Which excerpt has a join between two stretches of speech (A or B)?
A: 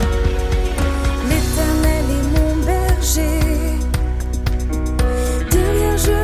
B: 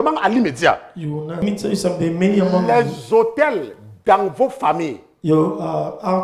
B